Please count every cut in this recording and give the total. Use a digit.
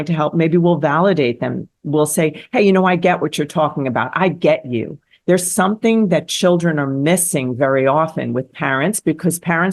0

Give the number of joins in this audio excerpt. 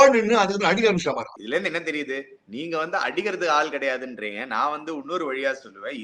1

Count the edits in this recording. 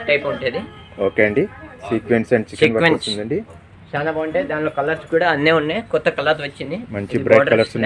0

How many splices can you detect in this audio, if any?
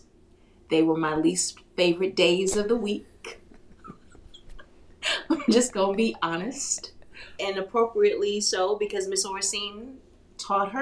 1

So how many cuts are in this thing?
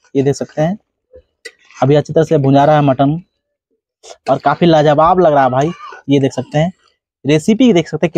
0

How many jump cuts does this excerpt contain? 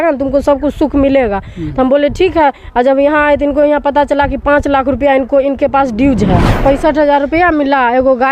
1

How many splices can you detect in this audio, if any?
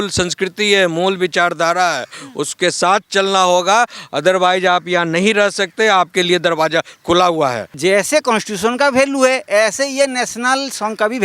1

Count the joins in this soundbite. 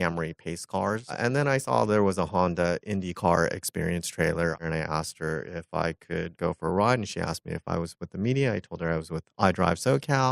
3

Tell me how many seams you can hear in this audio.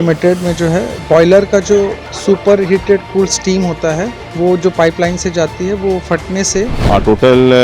4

